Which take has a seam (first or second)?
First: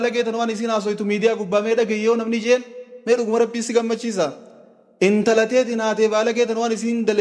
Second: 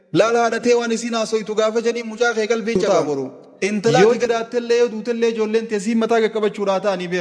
second